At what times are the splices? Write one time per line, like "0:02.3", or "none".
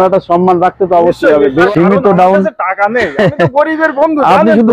0:01.7